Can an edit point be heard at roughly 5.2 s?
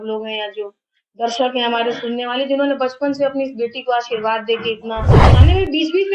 yes; 1 cut; at 5.2 s

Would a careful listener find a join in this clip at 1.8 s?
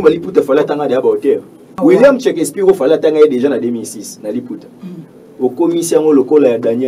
yes; 1 cut; at 1.8 s

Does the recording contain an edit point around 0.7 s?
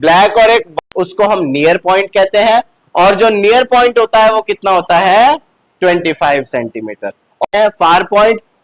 yes; 2 cuts; at 0.7 s, 7.4 s

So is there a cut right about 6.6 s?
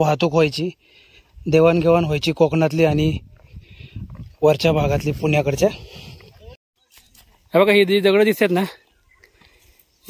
yes; 1 cut; at 6.6 s

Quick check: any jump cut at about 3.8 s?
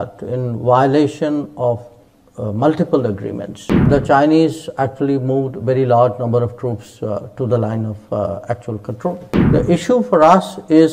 yes; 2 cuts; at 3.8 s, 9.3 s

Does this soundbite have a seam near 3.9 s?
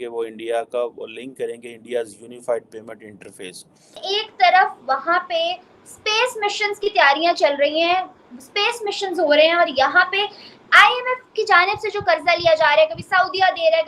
yes; 1 cut; at 3.9 s

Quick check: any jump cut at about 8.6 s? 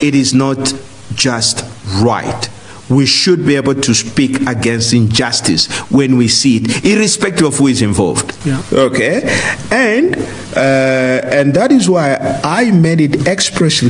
yes; 1 cut; at 8.6 s

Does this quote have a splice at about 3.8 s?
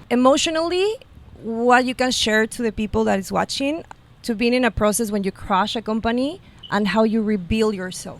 yes; 1 cut; at 3.8 s

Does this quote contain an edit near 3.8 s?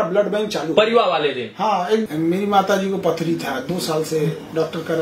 no; 1 cut; at 2.0 s

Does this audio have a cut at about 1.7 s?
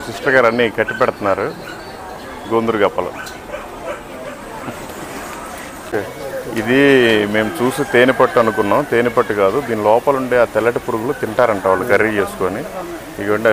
no; 1 cut; at 5.9 s

